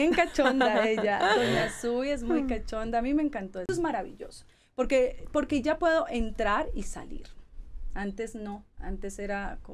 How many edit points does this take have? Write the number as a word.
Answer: one